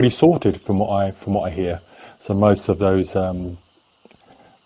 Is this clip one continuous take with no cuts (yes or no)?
yes